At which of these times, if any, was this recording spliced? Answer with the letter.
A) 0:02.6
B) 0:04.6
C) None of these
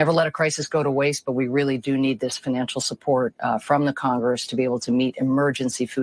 B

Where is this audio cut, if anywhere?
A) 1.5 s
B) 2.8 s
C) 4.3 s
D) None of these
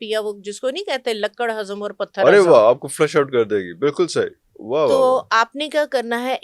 D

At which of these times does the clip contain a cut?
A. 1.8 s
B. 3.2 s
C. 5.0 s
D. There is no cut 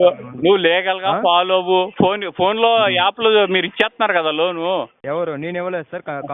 C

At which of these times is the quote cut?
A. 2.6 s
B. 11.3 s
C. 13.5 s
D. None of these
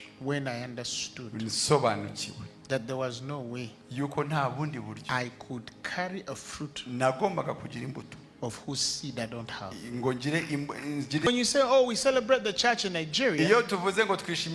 B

